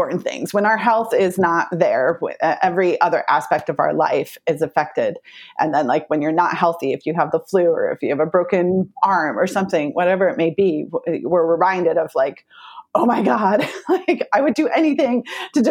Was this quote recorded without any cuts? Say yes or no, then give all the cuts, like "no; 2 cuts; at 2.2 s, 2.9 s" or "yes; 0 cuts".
yes; 0 cuts